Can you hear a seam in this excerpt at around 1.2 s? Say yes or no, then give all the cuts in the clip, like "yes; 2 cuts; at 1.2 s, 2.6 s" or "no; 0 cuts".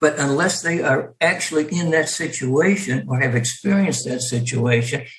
no; 0 cuts